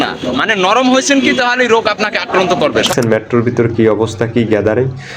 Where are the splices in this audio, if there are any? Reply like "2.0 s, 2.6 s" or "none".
2.9 s